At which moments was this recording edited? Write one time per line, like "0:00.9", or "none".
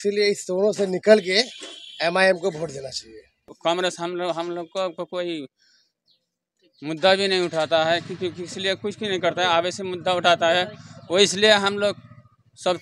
0:03.5